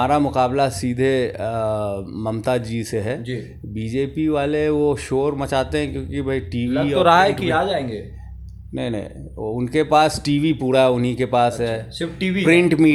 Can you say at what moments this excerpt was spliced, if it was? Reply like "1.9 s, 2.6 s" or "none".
none